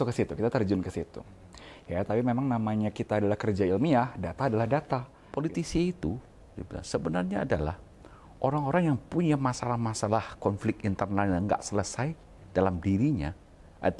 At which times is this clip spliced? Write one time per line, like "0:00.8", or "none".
0:05.2